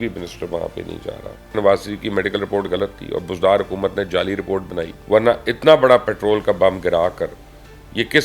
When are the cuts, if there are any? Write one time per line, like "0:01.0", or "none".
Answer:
0:01.5
0:05.0

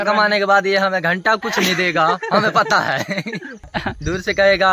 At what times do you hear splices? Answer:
0:03.6

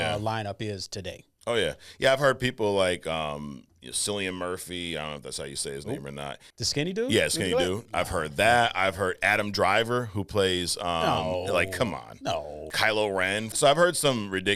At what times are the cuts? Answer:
0:06.4
0:12.7
0:13.5

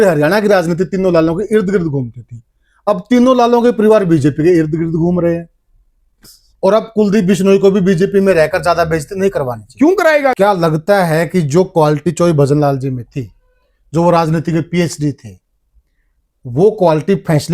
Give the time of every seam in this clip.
0:06.4
0:10.4

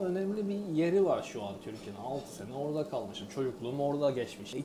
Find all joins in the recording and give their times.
none

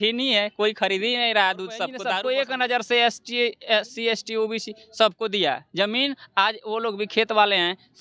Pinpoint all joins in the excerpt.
0:02.0

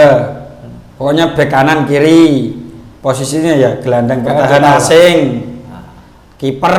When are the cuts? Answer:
none

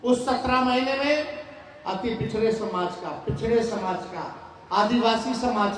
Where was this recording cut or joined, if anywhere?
none

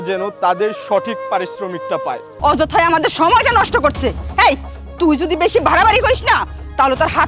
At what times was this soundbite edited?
0:02.3

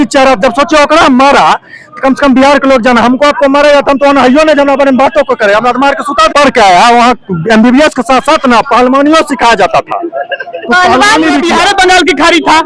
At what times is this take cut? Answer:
0:06.3
0:11.5

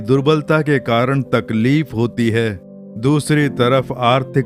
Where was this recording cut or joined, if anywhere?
none

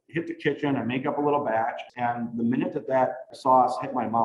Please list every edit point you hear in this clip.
0:01.9
0:03.3

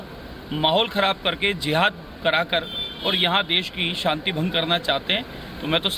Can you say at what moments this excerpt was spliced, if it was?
0:02.8

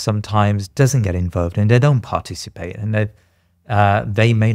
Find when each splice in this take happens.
none

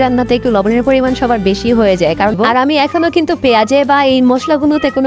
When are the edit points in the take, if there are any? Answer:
0:02.4

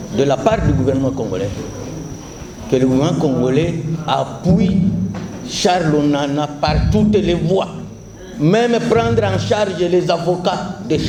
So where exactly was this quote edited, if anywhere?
none

